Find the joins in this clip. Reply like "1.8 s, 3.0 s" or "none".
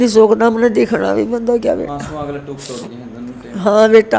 none